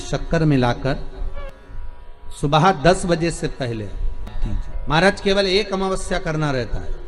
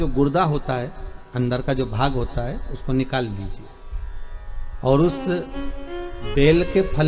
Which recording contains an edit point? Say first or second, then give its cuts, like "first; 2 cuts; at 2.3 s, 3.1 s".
first; 2 cuts; at 1.4 s, 4.4 s